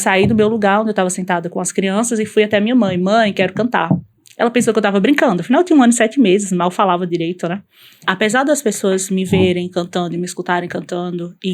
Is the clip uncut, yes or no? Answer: no